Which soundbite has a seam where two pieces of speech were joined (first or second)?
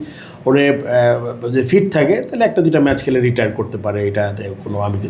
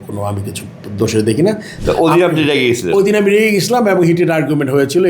second